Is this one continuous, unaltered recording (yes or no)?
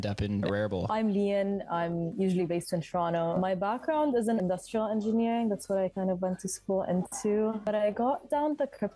no